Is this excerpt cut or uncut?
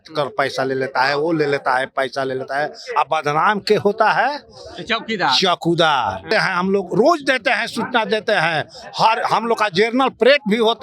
cut